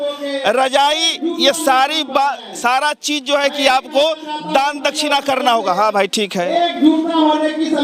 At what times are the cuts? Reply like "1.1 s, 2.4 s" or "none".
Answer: none